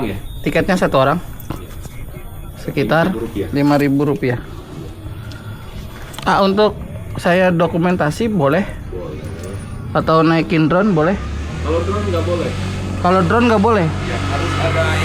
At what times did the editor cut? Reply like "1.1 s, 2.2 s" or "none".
none